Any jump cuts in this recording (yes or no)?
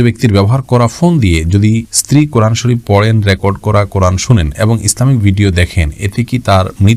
no